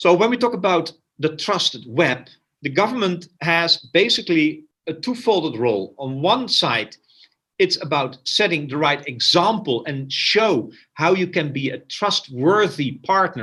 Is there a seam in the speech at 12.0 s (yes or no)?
no